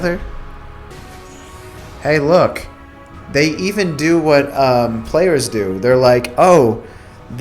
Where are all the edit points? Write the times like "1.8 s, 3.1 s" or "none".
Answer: 0.9 s